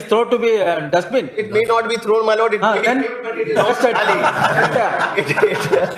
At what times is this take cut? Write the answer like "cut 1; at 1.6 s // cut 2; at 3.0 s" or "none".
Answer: none